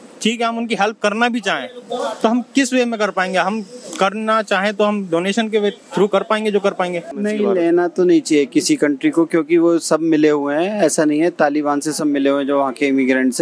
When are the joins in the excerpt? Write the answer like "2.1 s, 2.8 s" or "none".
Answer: 7.0 s